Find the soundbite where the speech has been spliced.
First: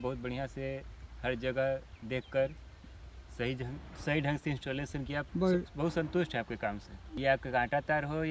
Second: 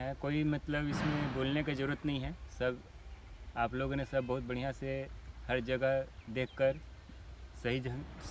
first; 2 cuts; at 5.3 s, 6.9 s

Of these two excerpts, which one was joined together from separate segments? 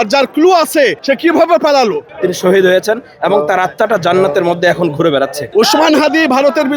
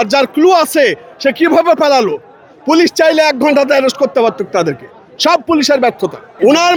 first; 3 cuts; at 1.0 s, 2.1 s, 5.4 s

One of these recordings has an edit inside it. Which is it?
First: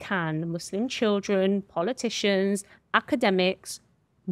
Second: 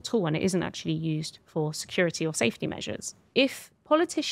second; 1 cut; at 3.2 s

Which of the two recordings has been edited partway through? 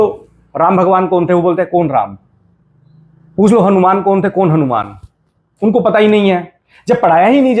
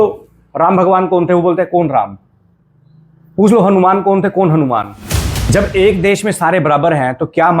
second; 1 cut; at 5.5 s

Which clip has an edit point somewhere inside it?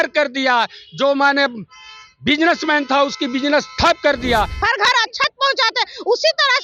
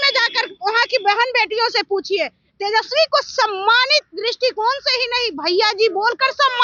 first; 1 cut; at 4.6 s

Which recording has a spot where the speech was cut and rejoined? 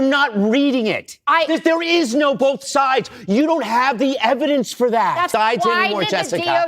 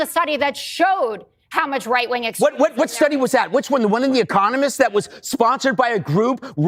first; 1 cut; at 5.3 s

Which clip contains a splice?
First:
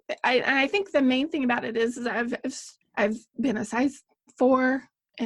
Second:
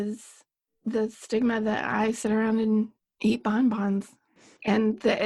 second; 1 cut; at 3.0 s

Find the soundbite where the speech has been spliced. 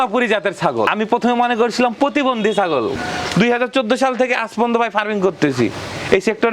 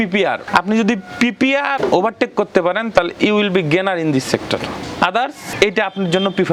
first; 2 cuts; at 0.9 s, 3.0 s

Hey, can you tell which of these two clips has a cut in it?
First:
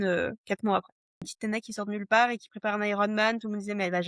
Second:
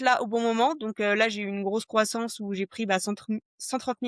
first; 1 cut; at 1.3 s

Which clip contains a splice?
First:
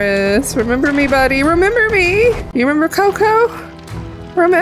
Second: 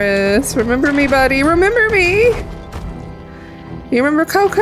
first; 1 cut; at 2.4 s

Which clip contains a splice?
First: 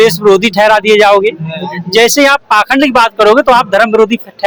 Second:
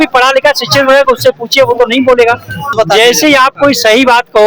second; 1 cut; at 2.7 s

